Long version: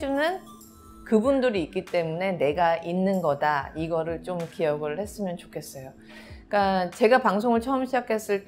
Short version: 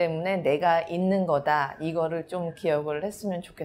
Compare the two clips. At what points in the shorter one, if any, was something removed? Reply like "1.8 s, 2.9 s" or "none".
none